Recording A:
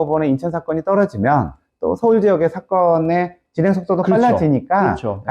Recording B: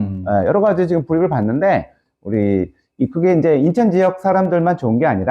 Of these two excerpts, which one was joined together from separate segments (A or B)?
B